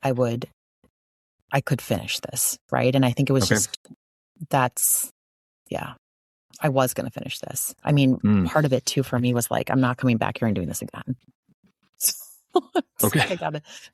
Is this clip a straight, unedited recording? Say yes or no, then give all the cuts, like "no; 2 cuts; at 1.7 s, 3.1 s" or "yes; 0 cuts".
yes; 0 cuts